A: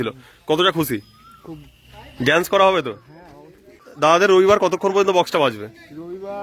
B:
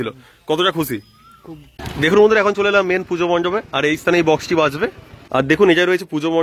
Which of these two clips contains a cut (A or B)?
B